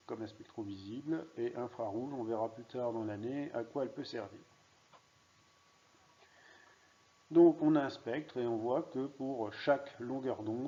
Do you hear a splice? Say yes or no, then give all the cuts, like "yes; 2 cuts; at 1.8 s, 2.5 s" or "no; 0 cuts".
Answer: no; 0 cuts